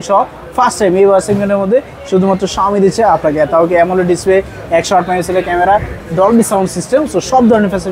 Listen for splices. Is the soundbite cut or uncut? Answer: uncut